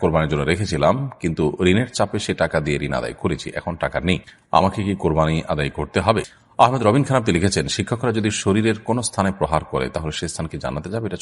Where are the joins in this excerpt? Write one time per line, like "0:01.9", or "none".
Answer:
0:04.3
0:06.4